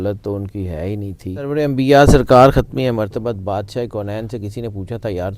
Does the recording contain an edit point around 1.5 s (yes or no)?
yes